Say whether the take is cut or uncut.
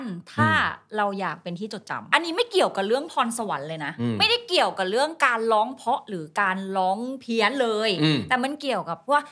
cut